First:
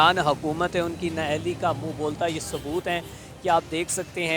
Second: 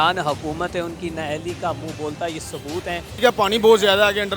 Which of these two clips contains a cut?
second; 1 cut; at 3.2 s

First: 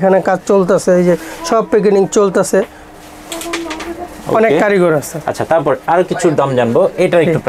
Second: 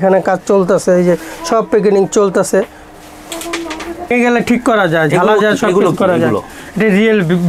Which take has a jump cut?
second; 1 cut; at 4.1 s

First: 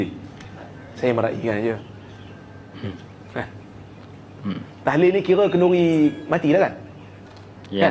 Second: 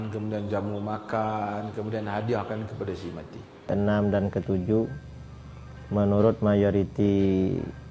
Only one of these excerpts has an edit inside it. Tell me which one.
second; 1 cut; at 3.7 s

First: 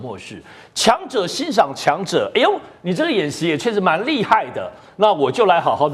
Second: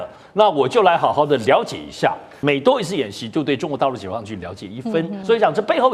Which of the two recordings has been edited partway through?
second; 2 cuts; at 2.3 s, 5.2 s

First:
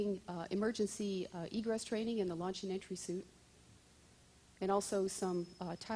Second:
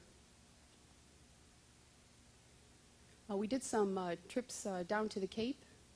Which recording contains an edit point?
first; 1 cut; at 2.7 s

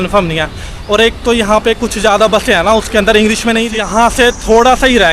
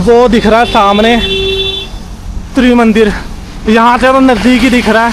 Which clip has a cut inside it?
first; 1 cut; at 3.7 s

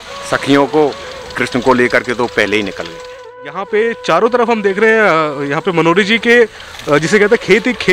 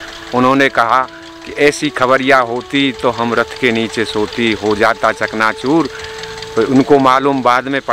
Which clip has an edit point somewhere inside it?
first; 2 cuts; at 1.4 s, 3.4 s

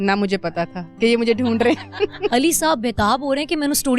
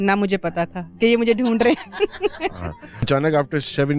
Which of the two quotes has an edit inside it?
first; 1 cut; at 2.3 s

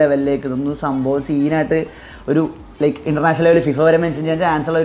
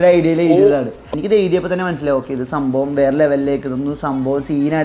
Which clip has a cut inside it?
second; 1 cut; at 1.1 s

